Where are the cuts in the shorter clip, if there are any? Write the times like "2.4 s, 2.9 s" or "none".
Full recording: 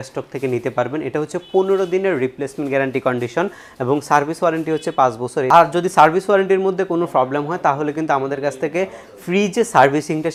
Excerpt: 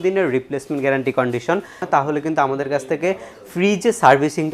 1.8 s